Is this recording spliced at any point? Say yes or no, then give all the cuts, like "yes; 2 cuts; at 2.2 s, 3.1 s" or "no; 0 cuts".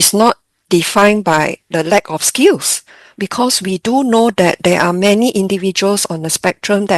yes; 1 cut; at 1.7 s